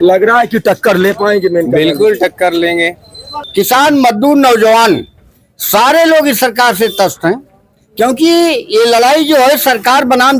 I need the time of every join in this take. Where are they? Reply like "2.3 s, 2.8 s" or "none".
3.3 s